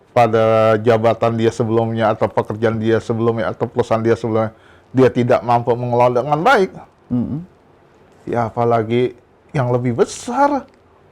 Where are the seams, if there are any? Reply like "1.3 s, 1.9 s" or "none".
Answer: none